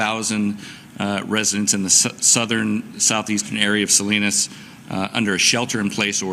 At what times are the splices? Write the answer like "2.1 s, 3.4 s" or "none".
none